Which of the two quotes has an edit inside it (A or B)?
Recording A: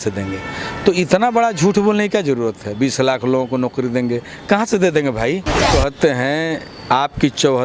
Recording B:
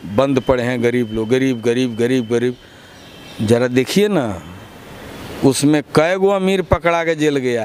A